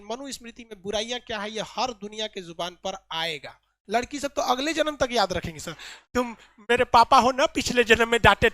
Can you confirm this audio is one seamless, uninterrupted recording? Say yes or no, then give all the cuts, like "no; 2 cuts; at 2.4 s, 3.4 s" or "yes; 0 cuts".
no; 1 cut; at 3.7 s